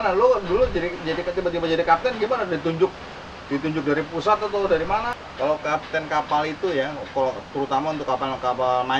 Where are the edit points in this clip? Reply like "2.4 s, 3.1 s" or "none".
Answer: 5.1 s